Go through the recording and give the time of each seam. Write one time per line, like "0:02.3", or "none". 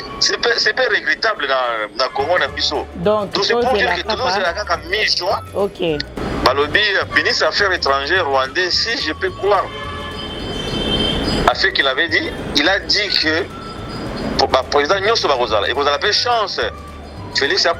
0:06.1